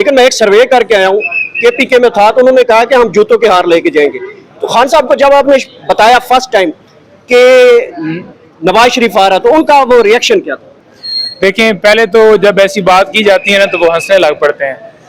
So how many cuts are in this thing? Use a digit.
0